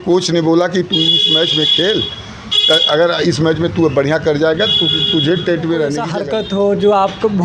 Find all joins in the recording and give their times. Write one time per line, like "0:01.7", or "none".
0:06.1